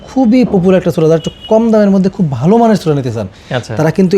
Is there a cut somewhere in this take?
no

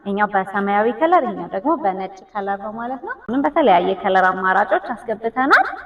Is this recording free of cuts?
no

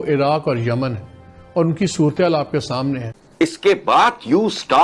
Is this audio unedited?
no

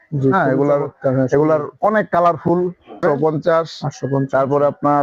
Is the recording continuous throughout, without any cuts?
no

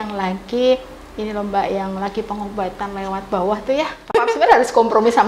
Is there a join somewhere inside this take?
yes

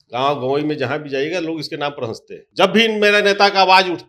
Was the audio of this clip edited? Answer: yes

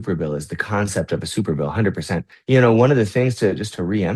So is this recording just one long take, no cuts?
no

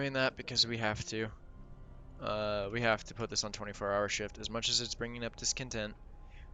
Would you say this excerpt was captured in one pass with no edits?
yes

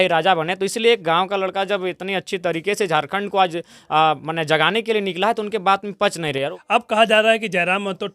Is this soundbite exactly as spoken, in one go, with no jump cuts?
no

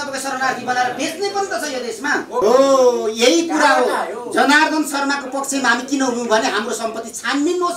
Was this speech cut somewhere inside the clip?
yes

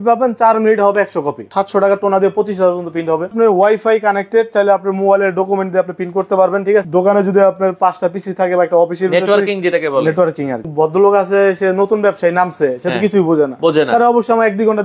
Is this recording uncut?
no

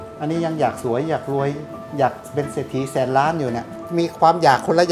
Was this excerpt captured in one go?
no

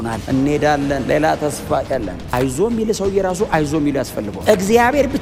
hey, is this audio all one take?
no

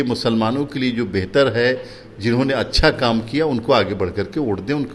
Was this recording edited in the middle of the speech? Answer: no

